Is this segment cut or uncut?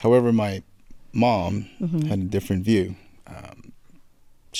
uncut